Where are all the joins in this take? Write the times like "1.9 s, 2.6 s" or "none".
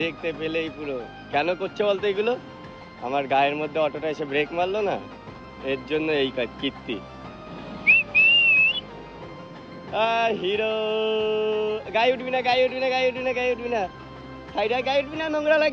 7.6 s